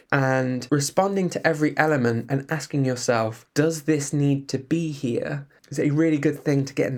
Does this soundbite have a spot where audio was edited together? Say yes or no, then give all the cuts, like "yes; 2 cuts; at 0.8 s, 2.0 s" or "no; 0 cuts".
no; 0 cuts